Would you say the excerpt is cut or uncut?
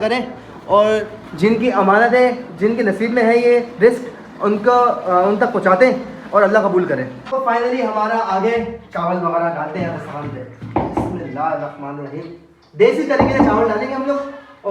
cut